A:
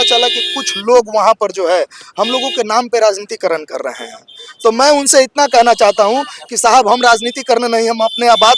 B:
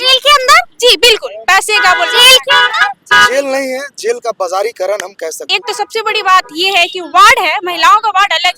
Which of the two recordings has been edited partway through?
B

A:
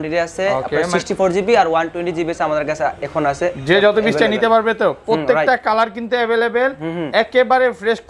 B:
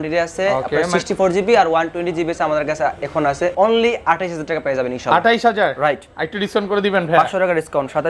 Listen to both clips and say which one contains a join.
B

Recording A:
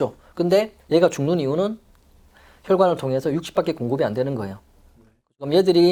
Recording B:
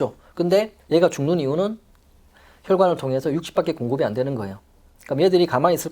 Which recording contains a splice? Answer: B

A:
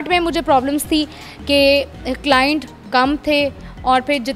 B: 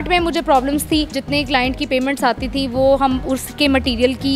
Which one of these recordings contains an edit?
B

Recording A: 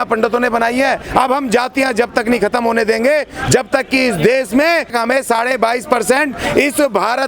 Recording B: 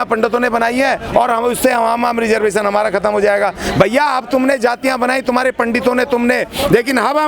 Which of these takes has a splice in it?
A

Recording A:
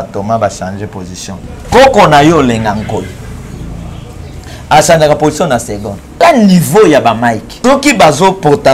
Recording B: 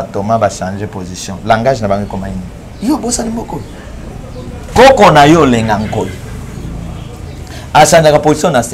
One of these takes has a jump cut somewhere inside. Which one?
A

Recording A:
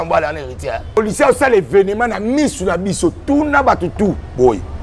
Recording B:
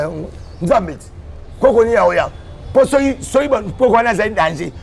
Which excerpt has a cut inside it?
A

